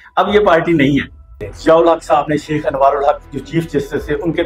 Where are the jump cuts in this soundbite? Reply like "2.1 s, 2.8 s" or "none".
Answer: 1.4 s